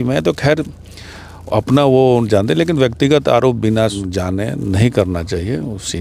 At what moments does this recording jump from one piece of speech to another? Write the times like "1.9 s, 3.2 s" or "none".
4.0 s